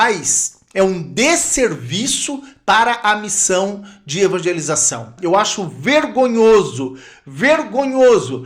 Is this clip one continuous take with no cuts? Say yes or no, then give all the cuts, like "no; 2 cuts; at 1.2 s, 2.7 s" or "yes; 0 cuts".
no; 1 cut; at 5.1 s